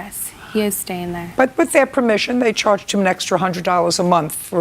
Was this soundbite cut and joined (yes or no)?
yes